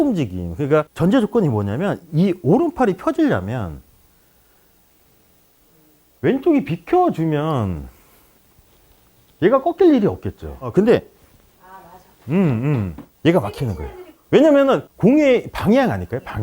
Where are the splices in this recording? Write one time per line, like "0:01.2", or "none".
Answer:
0:00.9
0:14.9